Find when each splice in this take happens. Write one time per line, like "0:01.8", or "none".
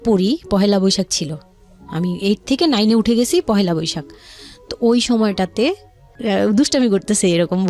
0:06.1